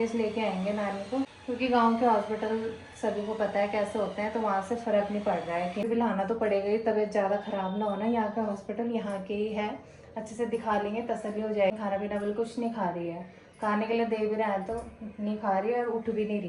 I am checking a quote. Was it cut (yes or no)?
yes